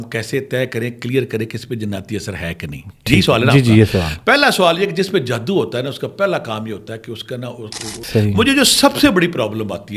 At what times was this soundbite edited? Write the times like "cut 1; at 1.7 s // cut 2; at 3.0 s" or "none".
cut 1; at 8.0 s